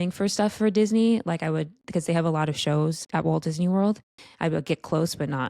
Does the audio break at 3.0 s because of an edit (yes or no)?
yes